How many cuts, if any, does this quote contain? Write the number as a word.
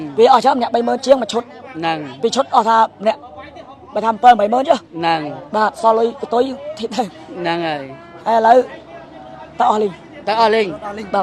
zero